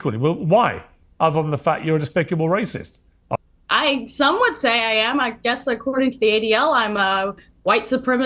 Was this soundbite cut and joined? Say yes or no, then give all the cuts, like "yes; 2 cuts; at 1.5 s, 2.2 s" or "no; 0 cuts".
yes; 1 cut; at 3.3 s